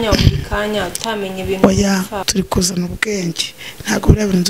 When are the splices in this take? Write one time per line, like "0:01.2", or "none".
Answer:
0:02.1

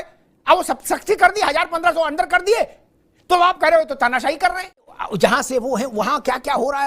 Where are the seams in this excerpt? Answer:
0:05.0

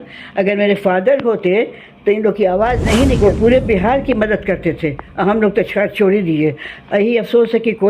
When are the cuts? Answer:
0:03.2

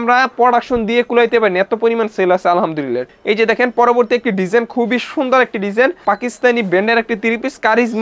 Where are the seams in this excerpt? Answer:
0:03.1
0:06.0

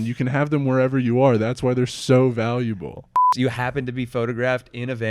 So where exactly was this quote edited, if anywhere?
0:03.3

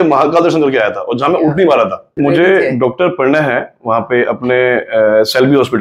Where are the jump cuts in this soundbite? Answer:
0:02.1

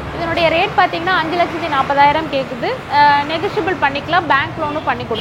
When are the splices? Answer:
none

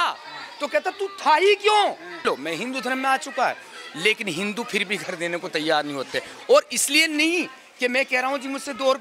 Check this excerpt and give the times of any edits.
0:02.2

